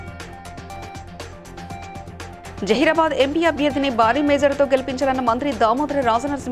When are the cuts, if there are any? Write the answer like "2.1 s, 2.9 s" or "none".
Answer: 2.3 s

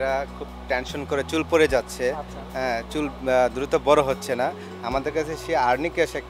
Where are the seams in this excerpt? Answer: none

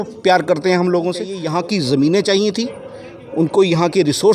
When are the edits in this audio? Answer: 1.4 s

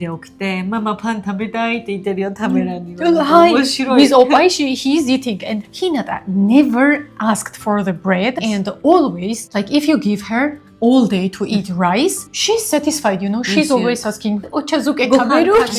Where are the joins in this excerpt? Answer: none

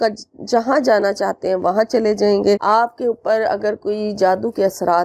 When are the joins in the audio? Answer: 2.6 s

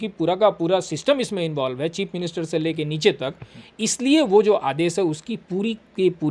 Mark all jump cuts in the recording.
none

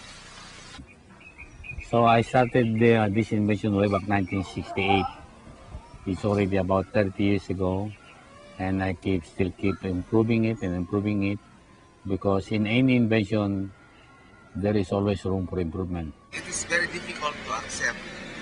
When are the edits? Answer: 12.2 s

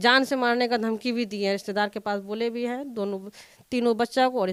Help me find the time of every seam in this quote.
none

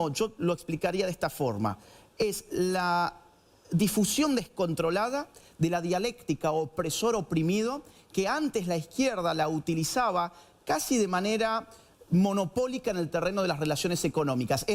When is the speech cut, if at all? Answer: none

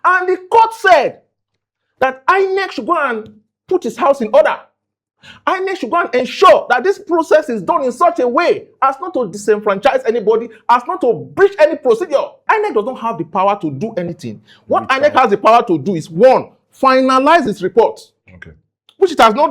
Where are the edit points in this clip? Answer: 12.4 s

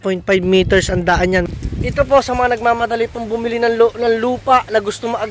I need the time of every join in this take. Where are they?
1.5 s

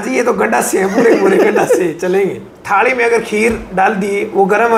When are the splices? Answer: 2.0 s

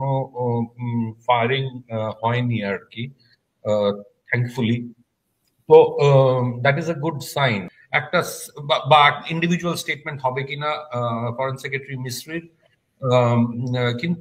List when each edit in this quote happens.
7.8 s

